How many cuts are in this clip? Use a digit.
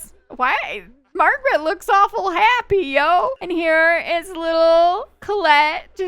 1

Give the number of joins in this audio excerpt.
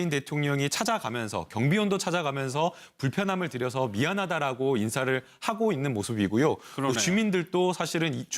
1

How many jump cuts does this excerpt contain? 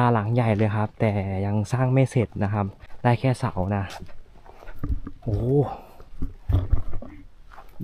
1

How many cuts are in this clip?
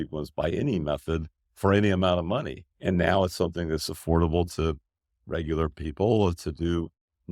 1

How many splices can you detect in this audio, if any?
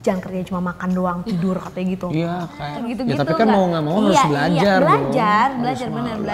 1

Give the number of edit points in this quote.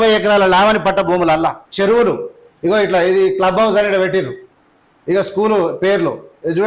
1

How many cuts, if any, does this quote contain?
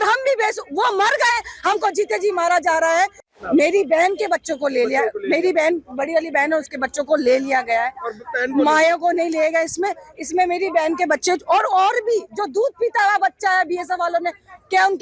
1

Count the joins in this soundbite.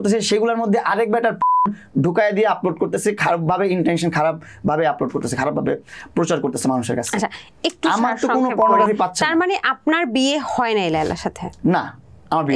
0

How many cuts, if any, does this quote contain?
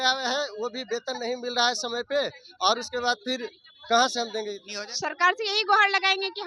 1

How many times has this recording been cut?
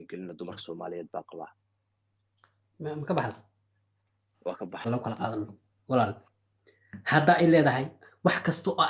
1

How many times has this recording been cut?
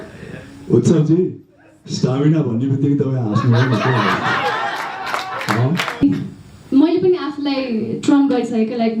1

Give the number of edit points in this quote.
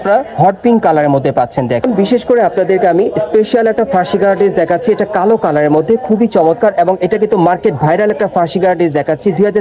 1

